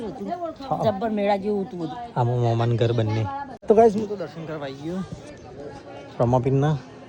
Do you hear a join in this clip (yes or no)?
yes